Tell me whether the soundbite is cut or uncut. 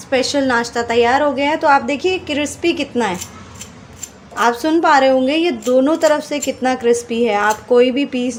uncut